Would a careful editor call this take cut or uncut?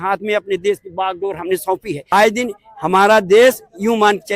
cut